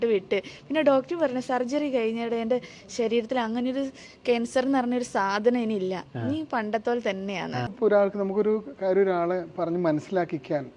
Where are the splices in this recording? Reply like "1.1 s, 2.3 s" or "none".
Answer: 7.7 s